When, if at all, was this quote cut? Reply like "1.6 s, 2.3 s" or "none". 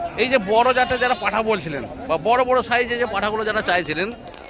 none